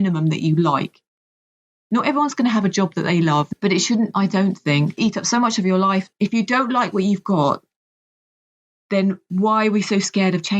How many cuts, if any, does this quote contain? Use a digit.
3